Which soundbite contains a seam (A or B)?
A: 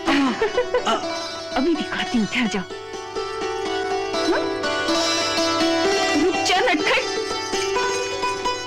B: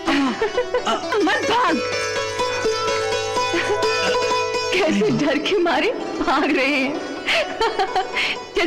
B